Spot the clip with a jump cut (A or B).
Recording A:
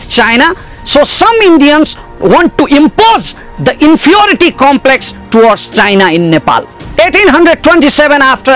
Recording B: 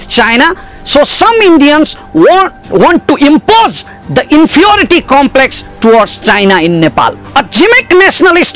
A